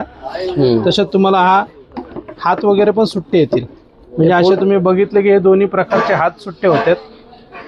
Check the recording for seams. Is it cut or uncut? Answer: uncut